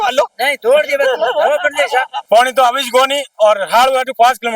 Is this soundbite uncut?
no; 1 cut; at 2.2 s

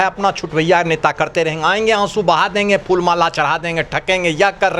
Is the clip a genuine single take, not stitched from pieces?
yes; 0 cuts

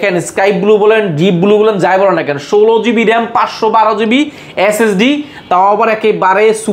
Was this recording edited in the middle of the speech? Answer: no; 0 cuts

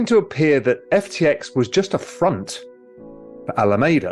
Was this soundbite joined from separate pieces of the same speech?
no; 0 cuts

